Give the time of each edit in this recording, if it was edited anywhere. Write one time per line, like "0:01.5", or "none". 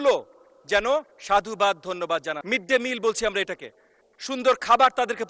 0:02.3